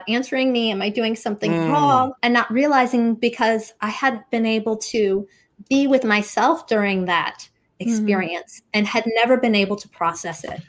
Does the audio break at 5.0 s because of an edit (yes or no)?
no